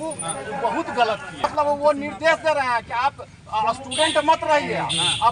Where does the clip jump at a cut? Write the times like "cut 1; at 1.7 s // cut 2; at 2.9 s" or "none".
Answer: cut 1; at 1.4 s